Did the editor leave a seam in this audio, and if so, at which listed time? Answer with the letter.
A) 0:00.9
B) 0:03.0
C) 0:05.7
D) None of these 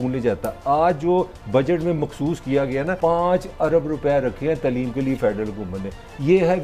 B